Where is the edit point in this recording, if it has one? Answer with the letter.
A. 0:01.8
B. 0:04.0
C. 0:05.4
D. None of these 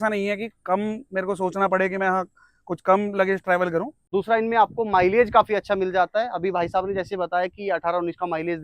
B